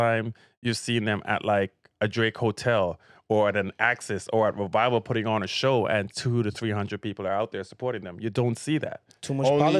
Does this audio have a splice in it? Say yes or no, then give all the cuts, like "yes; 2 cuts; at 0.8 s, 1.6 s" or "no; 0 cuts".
no; 0 cuts